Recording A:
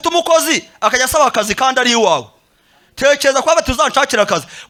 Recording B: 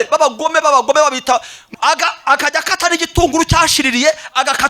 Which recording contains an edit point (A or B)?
B